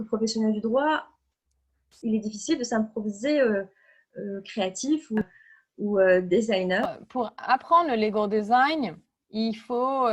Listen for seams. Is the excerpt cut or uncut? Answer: cut